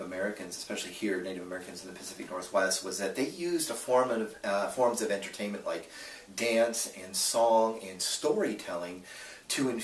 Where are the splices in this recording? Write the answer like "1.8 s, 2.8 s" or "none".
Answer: 3.7 s